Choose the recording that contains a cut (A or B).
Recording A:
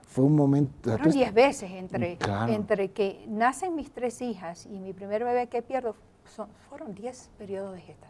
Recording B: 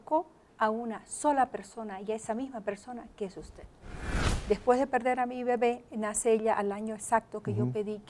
B